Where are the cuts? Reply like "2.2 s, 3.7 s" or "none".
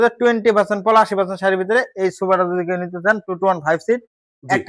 none